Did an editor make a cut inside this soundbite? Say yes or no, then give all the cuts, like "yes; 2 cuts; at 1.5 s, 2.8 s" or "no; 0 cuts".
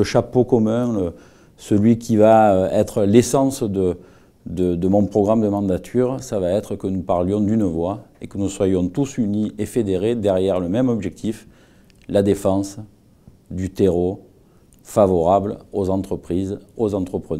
yes; 1 cut; at 3.0 s